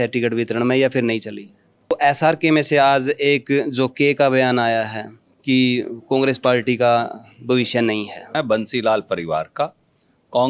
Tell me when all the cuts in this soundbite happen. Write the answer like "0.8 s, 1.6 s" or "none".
1.9 s, 8.3 s